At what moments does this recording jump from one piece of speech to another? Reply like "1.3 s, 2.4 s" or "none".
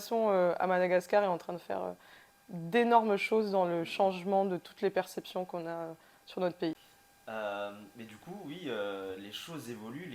none